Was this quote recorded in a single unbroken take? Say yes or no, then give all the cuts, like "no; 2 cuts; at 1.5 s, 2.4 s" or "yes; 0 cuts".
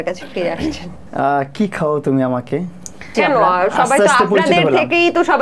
no; 2 cuts; at 0.9 s, 3.1 s